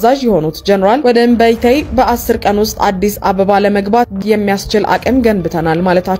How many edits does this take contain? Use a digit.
1